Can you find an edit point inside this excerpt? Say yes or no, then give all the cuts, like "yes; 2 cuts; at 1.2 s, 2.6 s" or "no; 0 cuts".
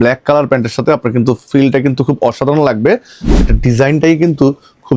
yes; 1 cut; at 3.4 s